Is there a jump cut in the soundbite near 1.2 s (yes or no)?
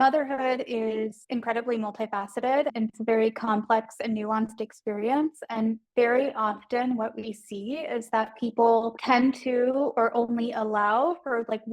yes